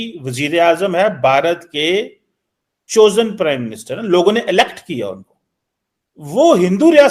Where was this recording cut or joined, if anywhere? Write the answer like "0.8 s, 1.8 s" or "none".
none